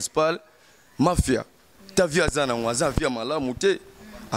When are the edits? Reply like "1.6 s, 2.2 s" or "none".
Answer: none